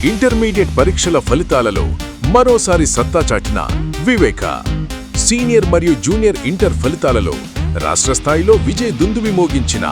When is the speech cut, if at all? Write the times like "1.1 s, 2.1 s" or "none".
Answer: none